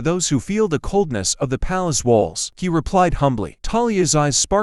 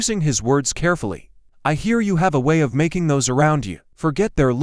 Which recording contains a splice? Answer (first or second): second